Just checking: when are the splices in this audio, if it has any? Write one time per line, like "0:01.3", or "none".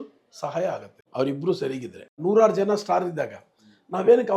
0:00.9
0:02.2